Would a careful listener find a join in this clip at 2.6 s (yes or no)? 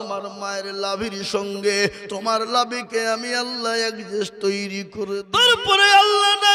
no